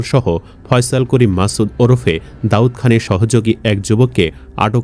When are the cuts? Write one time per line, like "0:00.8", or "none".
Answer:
none

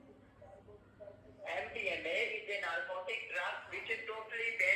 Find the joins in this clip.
none

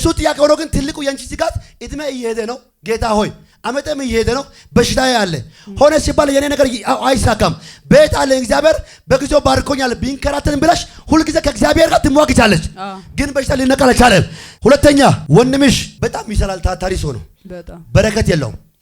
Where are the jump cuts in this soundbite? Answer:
0:14.4
0:15.2
0:15.9

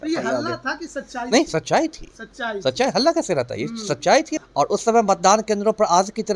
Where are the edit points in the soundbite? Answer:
0:04.4

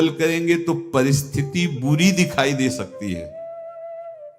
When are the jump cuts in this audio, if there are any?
0:03.2

